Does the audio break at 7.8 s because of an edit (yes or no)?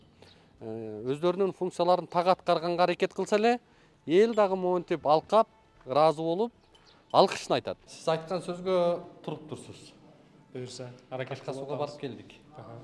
yes